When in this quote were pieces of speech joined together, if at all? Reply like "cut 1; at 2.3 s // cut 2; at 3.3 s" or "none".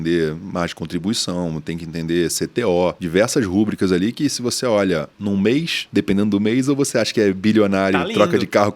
cut 1; at 3.0 s // cut 2; at 5.1 s // cut 3; at 5.8 s